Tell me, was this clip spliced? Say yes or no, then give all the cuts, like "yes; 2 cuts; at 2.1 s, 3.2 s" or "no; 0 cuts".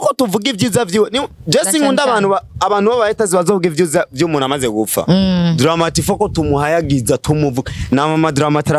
no; 0 cuts